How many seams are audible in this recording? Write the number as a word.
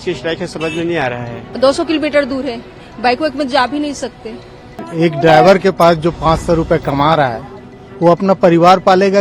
two